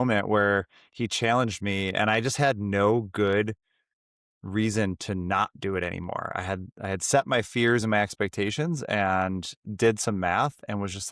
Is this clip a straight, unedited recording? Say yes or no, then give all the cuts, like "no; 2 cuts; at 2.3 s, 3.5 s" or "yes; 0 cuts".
yes; 0 cuts